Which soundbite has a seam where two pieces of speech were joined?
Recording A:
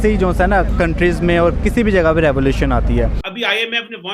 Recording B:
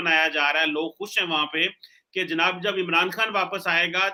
A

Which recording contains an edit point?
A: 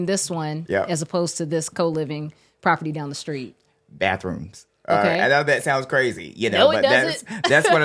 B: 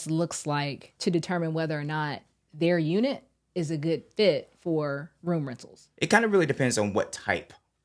B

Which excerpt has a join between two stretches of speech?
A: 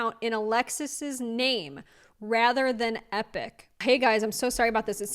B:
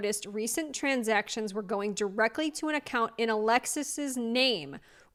A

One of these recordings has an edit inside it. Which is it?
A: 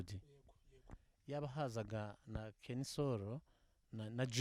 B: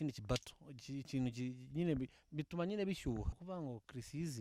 B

